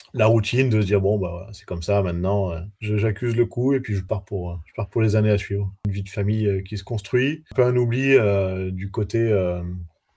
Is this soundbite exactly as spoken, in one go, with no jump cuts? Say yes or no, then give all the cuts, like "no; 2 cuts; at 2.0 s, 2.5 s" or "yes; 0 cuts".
no; 2 cuts; at 5.9 s, 7.4 s